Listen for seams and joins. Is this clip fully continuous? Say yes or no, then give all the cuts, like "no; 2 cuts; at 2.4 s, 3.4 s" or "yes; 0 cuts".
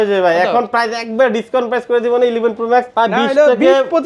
no; 1 cut; at 2.9 s